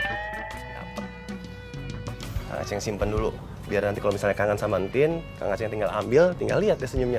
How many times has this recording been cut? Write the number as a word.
one